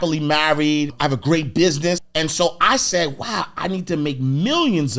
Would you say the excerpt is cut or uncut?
cut